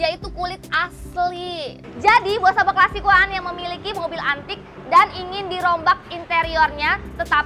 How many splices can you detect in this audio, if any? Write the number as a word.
one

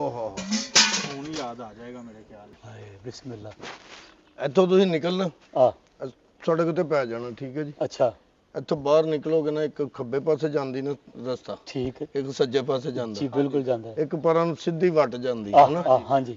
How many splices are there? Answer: one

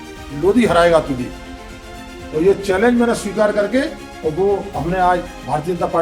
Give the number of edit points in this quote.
zero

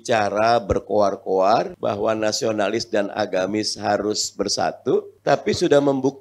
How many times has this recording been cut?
two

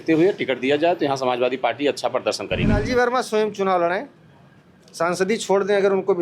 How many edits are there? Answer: one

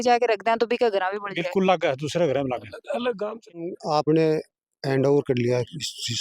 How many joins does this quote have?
one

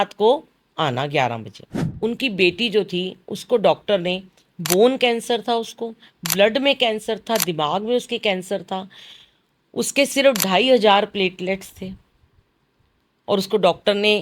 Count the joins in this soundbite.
one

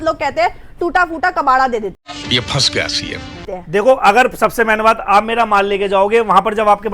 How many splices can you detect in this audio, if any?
zero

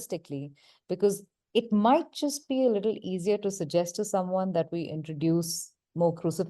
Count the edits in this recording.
one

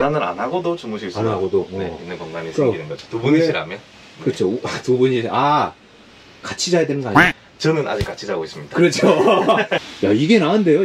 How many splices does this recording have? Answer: one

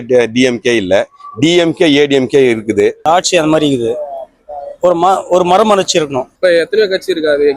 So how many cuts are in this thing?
two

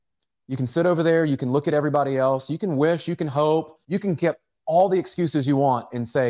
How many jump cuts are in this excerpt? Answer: one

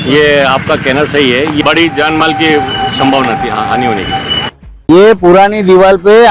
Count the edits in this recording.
two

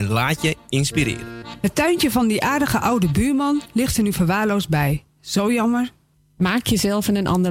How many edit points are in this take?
one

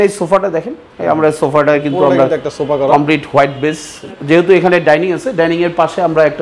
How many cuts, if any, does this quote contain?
one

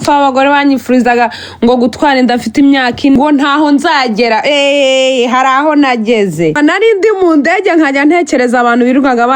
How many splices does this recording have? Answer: two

